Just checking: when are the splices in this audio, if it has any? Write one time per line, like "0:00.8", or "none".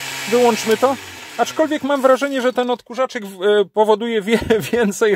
none